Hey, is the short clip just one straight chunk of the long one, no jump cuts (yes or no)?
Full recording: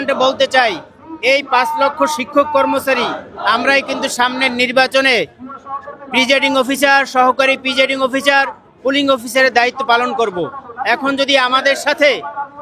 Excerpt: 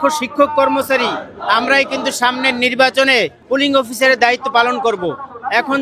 no